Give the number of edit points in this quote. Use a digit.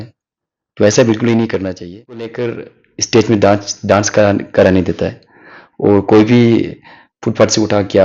1